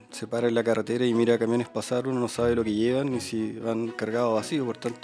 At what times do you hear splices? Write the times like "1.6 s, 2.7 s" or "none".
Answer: none